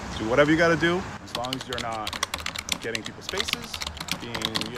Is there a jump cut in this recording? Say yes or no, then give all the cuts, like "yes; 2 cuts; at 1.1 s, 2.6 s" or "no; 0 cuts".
no; 0 cuts